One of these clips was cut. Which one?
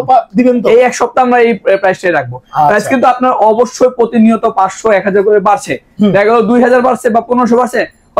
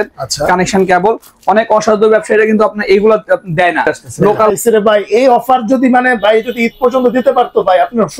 second; 1 cut; at 4.5 s

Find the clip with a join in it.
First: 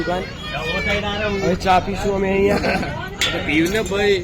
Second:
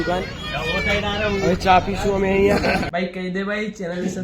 second; 1 cut; at 2.9 s

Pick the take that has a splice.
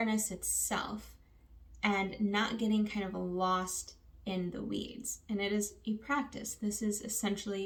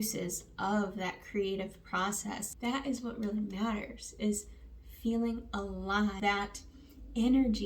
second; 2 cuts; at 2.5 s, 6.2 s

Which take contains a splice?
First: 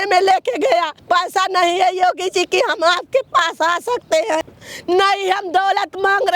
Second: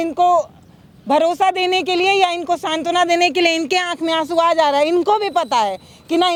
first; 2 cuts; at 1.0 s, 4.4 s

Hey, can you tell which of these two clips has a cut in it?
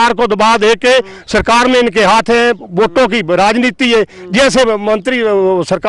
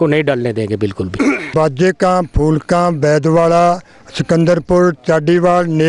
second; 1 cut; at 1.5 s

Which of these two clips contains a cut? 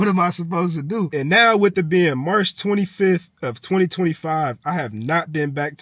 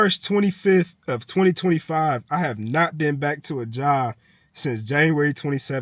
first; 1 cut; at 1.1 s

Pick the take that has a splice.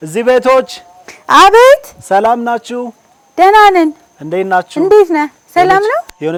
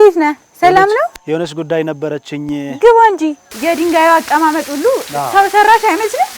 second; 1 cut; at 3.4 s

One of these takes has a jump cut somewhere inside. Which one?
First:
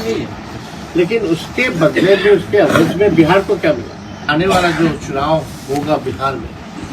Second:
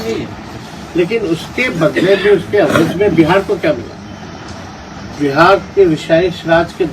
first; 1 cut; at 4.3 s

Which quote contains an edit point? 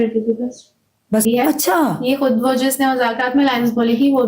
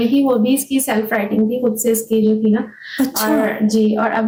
first; 1 cut; at 1.2 s

